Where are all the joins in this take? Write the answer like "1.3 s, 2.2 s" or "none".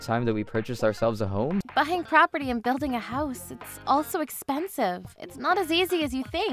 1.7 s